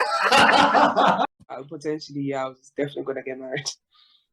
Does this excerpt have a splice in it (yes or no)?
yes